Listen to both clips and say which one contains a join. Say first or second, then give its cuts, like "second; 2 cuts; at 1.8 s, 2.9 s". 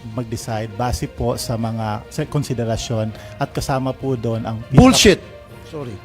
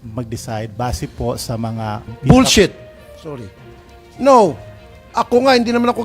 second; 1 cut; at 2.1 s